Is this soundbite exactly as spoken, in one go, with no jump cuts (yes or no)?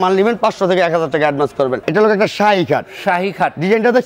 no